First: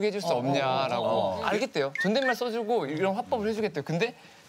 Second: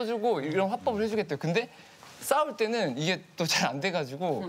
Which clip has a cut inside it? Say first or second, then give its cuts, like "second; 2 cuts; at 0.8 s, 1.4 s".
first; 1 cut; at 1.4 s